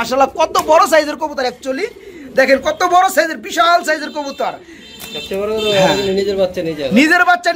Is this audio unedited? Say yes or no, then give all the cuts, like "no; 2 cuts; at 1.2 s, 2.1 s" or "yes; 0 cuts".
yes; 0 cuts